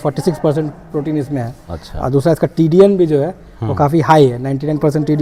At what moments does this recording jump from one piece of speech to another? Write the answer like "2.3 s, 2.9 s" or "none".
none